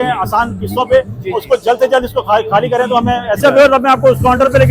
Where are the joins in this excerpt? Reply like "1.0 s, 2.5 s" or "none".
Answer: 3.4 s